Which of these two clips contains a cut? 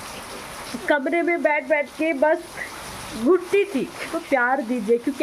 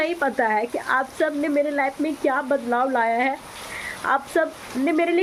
first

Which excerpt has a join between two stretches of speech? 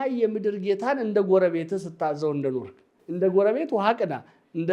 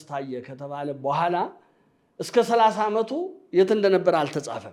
first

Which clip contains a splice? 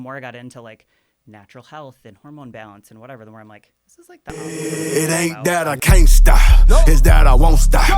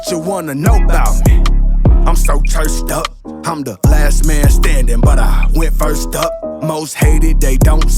first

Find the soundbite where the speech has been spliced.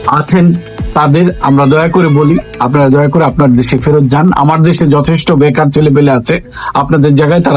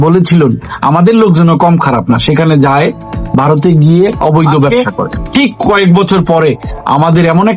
second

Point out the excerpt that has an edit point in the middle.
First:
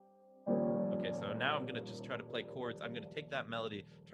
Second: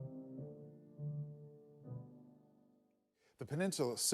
second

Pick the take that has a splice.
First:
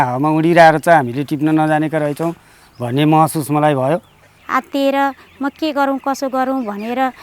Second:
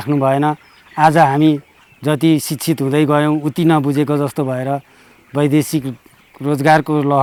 first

